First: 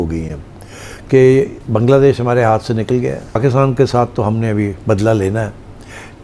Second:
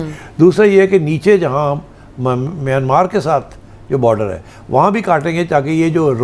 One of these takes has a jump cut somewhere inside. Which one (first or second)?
first